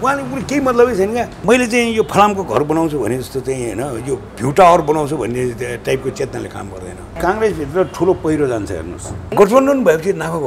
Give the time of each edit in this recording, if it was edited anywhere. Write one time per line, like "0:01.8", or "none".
0:01.3
0:07.2
0:09.3